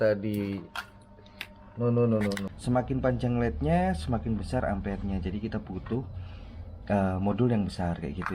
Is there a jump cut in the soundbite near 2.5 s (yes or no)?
yes